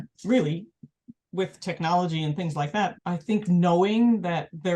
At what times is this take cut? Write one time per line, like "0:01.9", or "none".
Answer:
0:03.0